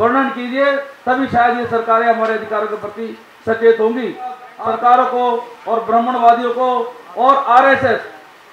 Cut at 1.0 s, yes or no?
no